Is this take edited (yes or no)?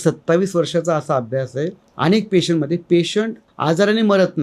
yes